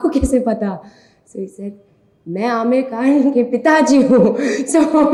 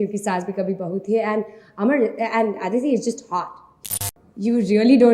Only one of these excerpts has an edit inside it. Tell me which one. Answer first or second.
second